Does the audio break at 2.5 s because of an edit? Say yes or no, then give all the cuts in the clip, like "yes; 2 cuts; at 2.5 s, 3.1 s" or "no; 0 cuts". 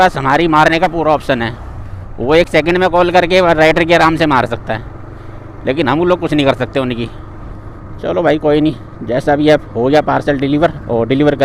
no; 0 cuts